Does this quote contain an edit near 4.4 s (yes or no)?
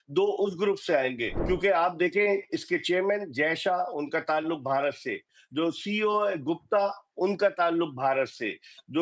no